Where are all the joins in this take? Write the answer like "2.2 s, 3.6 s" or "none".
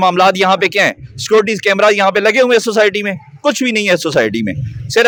none